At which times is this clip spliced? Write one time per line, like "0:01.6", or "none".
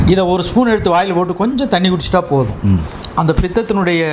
none